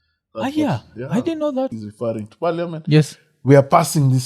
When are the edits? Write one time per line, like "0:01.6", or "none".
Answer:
0:01.8